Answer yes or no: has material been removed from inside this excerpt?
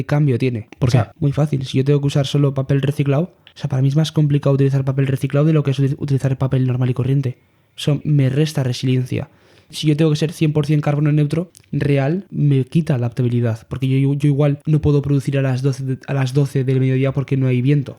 yes